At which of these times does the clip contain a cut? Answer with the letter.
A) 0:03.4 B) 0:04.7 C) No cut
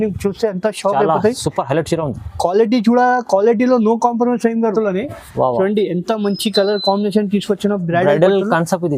B